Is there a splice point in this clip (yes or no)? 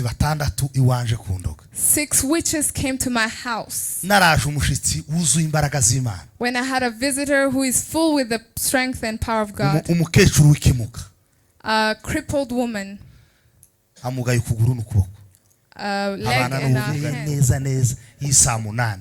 yes